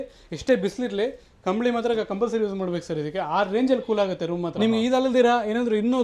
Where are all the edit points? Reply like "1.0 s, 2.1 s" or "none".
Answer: 4.4 s